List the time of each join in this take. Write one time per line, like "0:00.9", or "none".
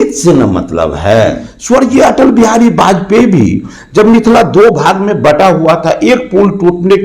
0:01.5